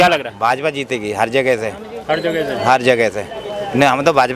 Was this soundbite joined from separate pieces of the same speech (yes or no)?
no